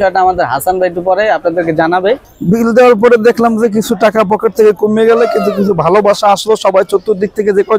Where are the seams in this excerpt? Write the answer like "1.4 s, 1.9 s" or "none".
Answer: 2.4 s